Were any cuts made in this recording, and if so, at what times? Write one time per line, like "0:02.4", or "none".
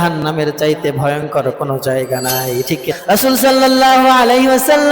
0:02.9